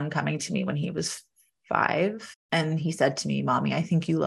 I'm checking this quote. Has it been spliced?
yes; 1 cut; at 2.3 s

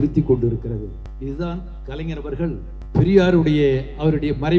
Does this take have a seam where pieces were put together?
yes; 2 cuts; at 1.0 s, 2.7 s

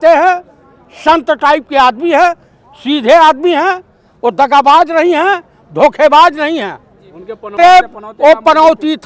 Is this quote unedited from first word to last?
no; 1 cut; at 7.6 s

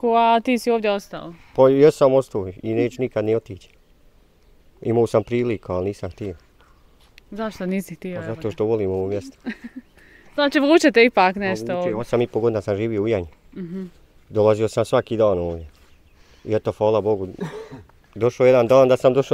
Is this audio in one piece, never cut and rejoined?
yes; 0 cuts

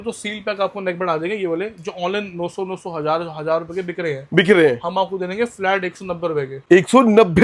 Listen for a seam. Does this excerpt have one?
no; 0 cuts

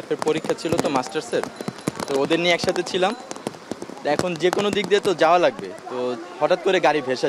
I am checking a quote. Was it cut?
no; 0 cuts

